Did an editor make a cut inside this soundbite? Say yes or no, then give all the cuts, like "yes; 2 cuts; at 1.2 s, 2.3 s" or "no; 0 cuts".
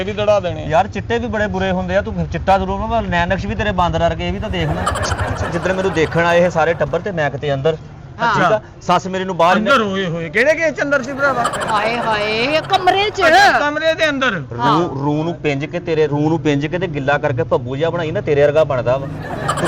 yes; 1 cut; at 5.5 s